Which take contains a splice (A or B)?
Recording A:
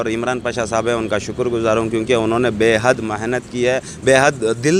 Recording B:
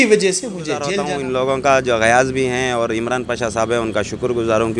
B